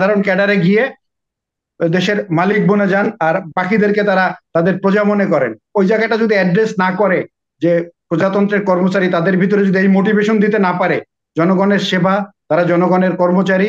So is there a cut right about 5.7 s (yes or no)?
yes